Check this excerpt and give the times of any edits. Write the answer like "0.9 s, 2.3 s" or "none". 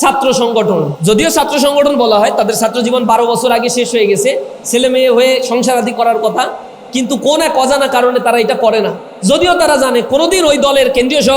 0.9 s